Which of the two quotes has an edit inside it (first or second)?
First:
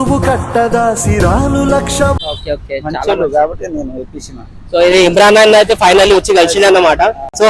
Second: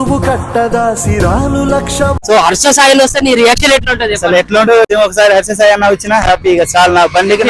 second